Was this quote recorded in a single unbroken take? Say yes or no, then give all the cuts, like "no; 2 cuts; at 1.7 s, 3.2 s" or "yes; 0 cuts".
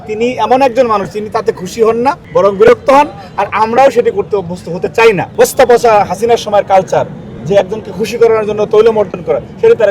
no; 2 cuts; at 2.2 s, 5.3 s